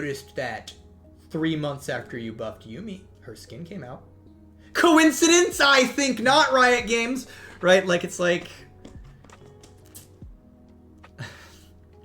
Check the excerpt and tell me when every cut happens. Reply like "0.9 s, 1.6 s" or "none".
none